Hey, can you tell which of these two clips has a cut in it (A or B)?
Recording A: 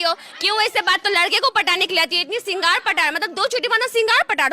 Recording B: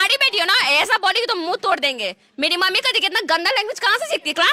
A